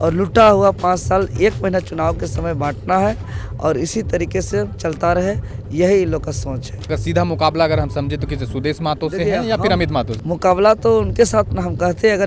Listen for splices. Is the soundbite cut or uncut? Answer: cut